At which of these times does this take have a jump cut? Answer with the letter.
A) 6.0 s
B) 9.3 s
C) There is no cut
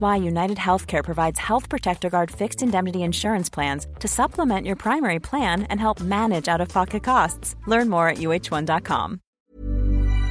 B